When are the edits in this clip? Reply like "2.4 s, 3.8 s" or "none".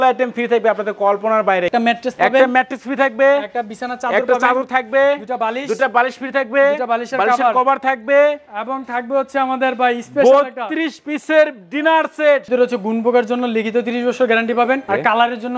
1.7 s, 12.4 s

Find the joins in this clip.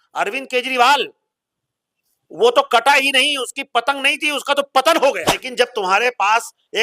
5.4 s

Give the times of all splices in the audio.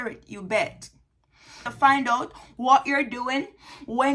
1.6 s

